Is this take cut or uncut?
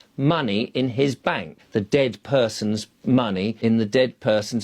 cut